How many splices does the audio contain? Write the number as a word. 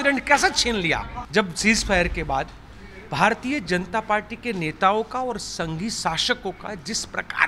one